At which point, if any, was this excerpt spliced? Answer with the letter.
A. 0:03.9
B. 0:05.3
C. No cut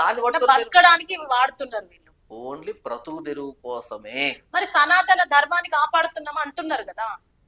C